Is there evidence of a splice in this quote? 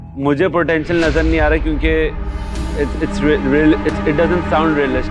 no; 0 cuts

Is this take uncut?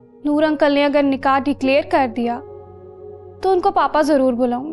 yes; 0 cuts

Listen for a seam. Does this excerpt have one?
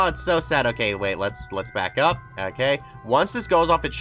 no; 0 cuts

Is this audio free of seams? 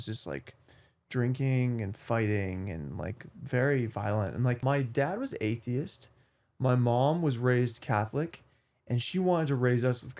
no; 1 cut; at 4.6 s

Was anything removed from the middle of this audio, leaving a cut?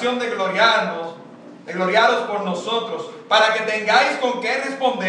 yes; 1 cut; at 1.6 s

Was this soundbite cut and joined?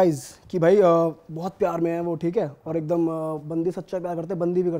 no; 0 cuts

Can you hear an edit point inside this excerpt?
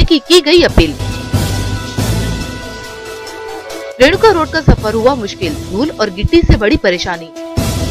no; 0 cuts

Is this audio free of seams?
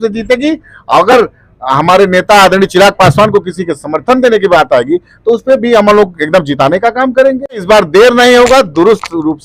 no; 1 cut; at 7.6 s

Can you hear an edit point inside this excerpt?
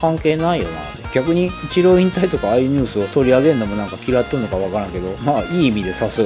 yes; 3 cuts; at 1.6 s, 3.0 s, 5.1 s

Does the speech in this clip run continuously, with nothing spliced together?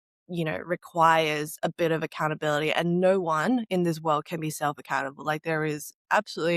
yes; 0 cuts

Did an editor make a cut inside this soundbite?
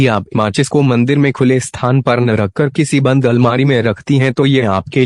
yes; 1 cut; at 3.5 s

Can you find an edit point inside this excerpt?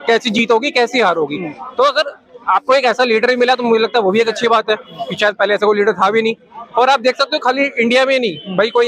no; 0 cuts

